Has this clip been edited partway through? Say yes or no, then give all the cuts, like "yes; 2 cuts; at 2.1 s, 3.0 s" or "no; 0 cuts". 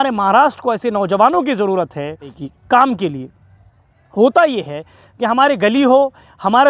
yes; 1 cut; at 2.3 s